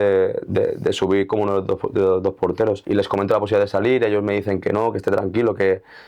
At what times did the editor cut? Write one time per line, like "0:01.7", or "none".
0:02.8